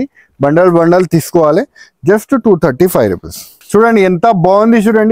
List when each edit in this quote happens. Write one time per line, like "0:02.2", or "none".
0:03.6